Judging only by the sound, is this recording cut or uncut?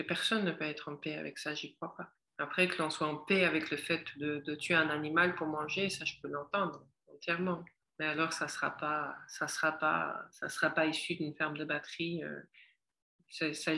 cut